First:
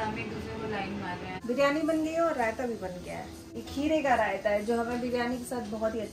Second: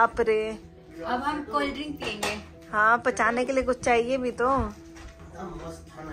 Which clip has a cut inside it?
first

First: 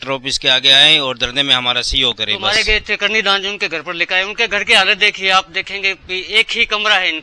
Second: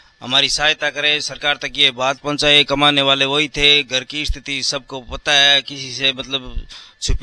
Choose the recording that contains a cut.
first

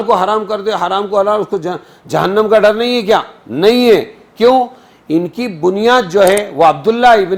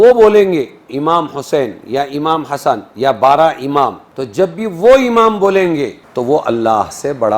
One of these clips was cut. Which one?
second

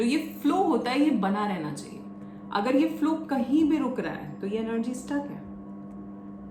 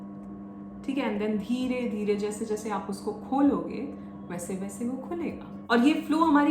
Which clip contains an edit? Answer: second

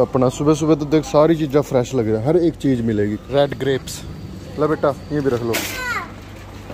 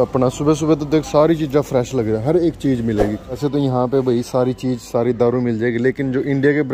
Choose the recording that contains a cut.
second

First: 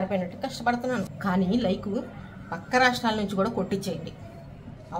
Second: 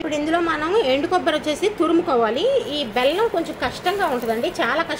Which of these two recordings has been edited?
first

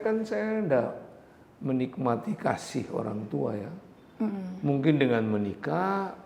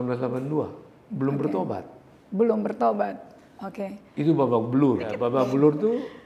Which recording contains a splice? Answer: second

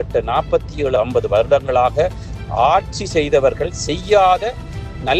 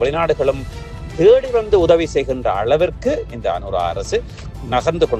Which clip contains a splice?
first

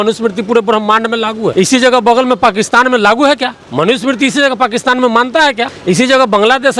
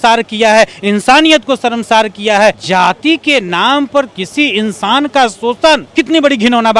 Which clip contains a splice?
first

